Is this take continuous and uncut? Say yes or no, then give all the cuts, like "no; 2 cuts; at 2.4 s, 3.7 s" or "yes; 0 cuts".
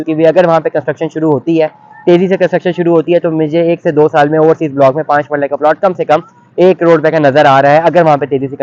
yes; 0 cuts